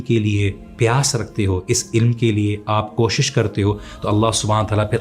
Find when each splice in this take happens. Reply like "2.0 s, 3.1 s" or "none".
none